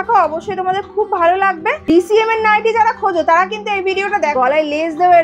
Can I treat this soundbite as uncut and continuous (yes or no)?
no